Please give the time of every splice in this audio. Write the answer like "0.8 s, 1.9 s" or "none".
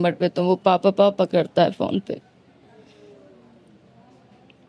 none